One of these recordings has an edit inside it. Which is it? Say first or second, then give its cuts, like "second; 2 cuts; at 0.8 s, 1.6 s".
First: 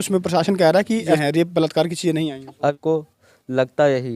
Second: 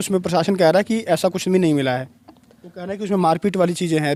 first; 2 cuts; at 1.2 s, 2.7 s